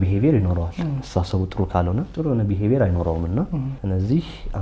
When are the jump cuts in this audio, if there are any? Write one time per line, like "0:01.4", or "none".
0:02.1
0:03.7